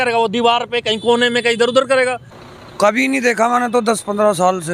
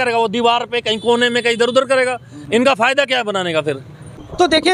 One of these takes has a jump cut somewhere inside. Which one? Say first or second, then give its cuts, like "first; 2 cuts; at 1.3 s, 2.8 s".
first; 1 cut; at 2.3 s